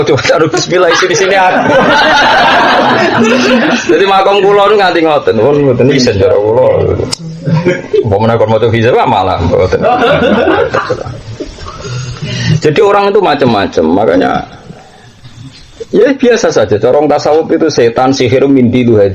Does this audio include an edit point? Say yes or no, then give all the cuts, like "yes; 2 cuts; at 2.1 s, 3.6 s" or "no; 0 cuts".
no; 0 cuts